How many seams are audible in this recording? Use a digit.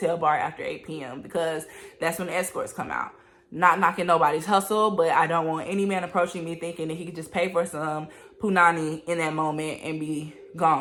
0